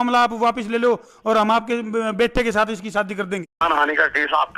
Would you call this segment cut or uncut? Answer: cut